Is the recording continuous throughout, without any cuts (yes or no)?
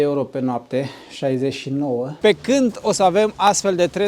no